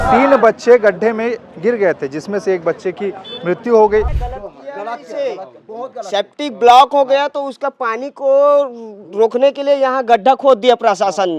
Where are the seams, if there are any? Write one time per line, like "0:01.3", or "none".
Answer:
0:04.2

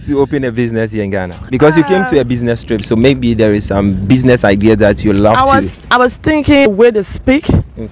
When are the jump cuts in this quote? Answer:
0:06.7

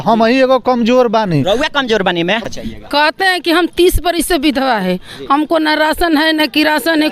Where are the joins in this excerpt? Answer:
0:02.5

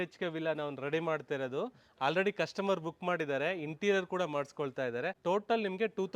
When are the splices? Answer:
0:05.2

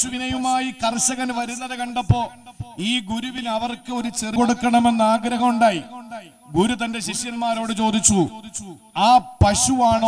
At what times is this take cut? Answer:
0:04.4

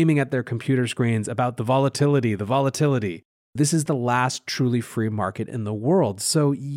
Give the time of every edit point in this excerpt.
0:03.5

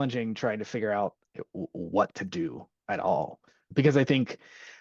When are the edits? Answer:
0:01.2
0:03.7

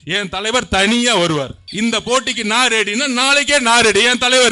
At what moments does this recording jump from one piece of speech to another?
0:01.6

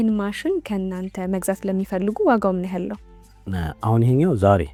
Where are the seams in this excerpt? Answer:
none

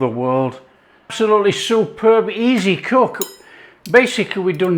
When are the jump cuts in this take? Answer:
0:01.1

